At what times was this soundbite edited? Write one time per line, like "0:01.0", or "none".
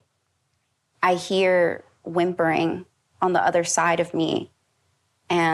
none